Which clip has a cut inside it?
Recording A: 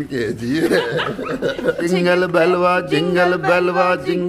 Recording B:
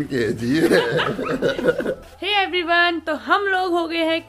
A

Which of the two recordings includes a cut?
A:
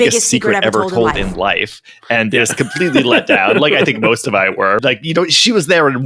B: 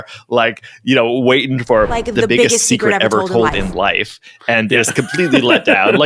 A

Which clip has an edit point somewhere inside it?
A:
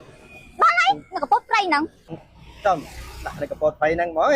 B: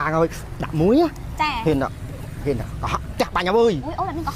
A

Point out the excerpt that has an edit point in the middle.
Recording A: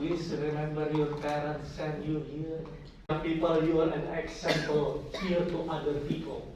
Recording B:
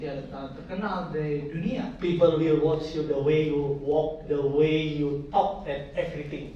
A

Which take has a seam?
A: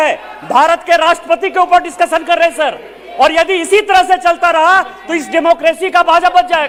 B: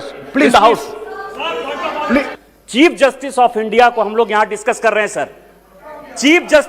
B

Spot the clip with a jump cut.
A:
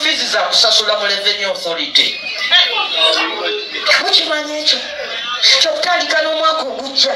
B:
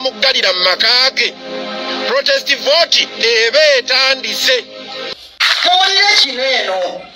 B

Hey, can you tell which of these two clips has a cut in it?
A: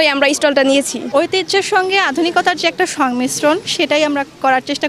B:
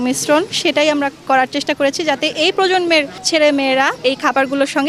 A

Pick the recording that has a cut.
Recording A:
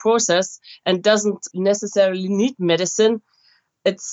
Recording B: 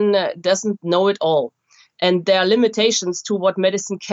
A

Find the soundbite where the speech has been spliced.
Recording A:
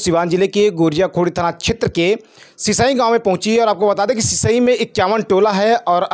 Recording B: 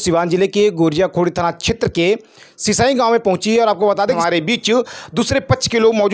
B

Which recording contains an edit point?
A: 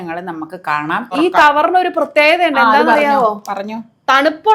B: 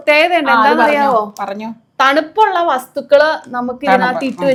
A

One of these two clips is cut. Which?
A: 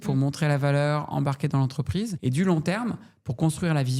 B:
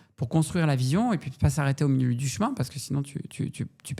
A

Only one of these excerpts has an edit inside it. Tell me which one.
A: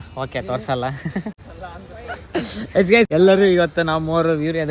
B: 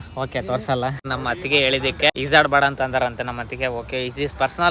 B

